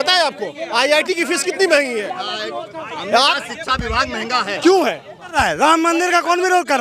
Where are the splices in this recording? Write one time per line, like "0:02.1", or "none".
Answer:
0:05.3

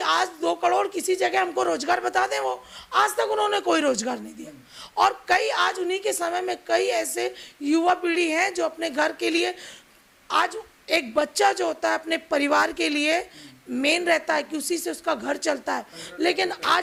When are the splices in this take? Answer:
none

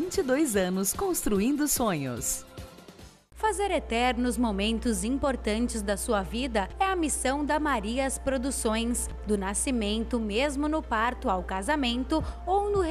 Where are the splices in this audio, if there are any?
0:03.2

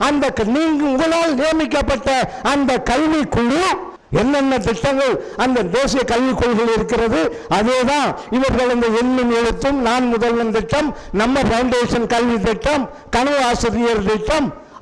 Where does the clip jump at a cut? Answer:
0:03.9

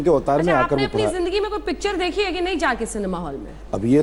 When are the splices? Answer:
none

